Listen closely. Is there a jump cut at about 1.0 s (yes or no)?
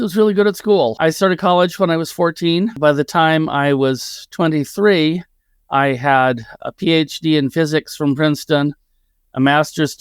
yes